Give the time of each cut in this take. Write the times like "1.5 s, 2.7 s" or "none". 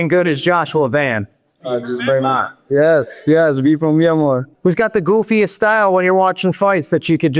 4.5 s